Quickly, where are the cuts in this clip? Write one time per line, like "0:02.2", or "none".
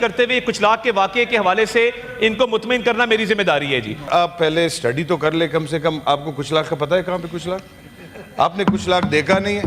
0:04.1

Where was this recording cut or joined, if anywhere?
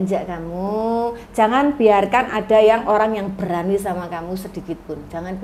none

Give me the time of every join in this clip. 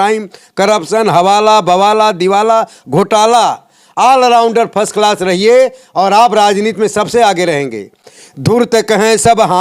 none

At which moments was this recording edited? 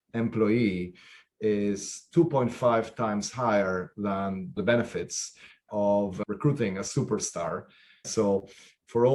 0:04.6
0:06.2
0:08.1

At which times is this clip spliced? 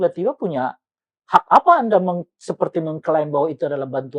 none

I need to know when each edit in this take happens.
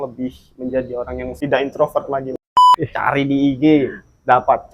0:01.3
0:02.5

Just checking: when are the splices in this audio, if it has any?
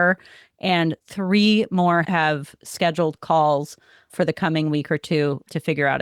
0:02.1

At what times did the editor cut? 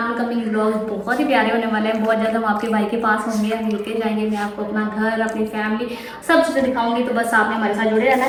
none

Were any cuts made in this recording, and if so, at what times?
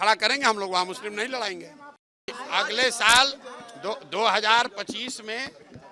0:02.3

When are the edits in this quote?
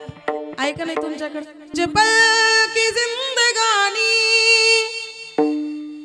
0:01.7

